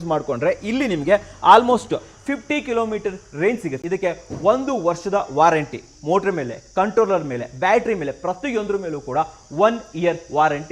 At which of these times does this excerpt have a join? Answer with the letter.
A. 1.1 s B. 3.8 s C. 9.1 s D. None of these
B